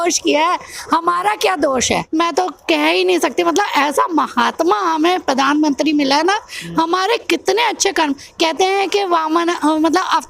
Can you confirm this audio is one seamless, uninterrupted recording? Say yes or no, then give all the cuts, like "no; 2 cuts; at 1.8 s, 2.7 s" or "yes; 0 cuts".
no; 1 cut; at 2.1 s